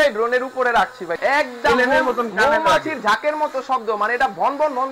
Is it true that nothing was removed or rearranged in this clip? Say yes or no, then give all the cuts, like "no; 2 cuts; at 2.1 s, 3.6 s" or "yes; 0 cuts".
no; 1 cut; at 1.1 s